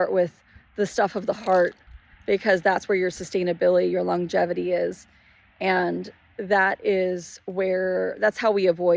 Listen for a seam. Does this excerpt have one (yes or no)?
no